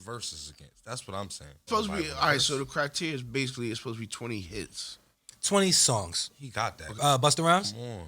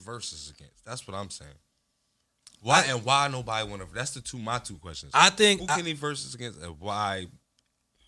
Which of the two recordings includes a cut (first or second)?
first